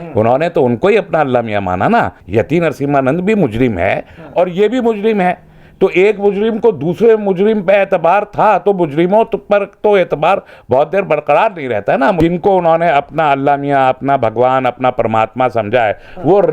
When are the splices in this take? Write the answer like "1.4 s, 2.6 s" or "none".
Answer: 2.2 s, 12.2 s